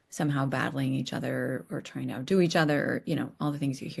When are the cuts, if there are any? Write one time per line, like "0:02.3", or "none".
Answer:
none